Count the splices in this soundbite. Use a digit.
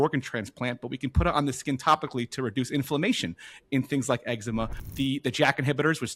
1